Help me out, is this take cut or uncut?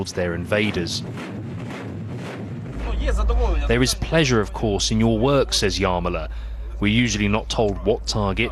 uncut